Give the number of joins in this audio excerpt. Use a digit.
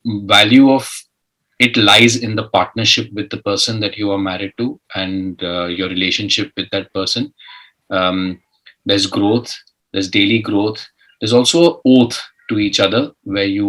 0